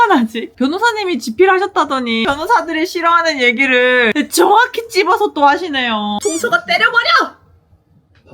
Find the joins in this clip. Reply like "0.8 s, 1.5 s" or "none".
2.2 s, 4.1 s, 6.2 s